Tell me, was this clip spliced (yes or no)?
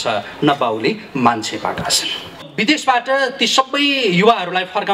yes